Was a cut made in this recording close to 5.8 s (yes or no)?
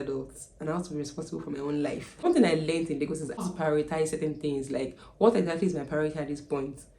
no